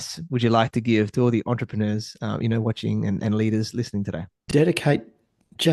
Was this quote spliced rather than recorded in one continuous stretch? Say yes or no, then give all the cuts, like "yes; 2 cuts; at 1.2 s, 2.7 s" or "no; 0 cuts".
yes; 1 cut; at 4.3 s